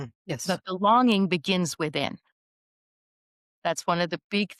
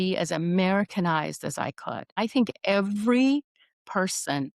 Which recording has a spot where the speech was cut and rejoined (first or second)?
second